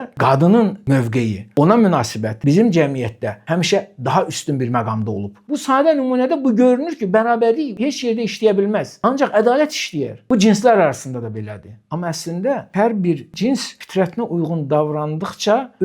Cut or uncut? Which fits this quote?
cut